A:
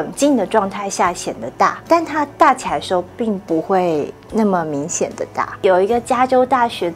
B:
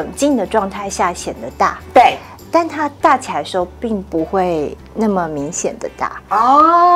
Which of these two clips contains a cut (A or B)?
A